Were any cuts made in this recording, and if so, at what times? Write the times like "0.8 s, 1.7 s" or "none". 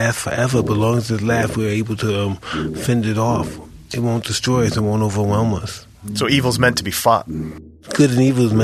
6.1 s, 7.4 s